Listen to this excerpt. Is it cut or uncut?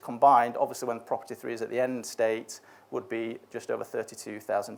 uncut